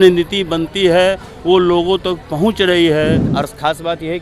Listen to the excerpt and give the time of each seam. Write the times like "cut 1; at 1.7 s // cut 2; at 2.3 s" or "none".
cut 1; at 3.3 s